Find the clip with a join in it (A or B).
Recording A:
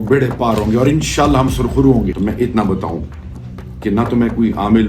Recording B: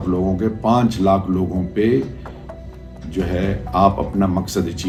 A